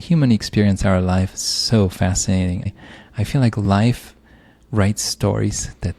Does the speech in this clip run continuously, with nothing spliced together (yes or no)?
no